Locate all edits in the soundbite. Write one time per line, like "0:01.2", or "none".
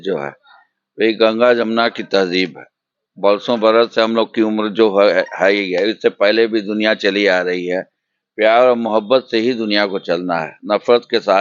none